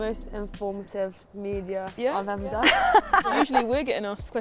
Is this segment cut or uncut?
cut